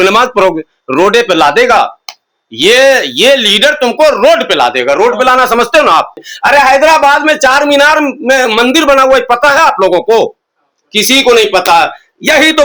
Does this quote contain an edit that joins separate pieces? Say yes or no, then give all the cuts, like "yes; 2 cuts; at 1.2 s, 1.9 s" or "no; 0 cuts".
yes; 1 cut; at 6.3 s